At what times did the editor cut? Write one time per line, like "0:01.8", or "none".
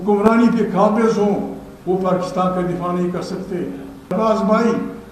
0:04.1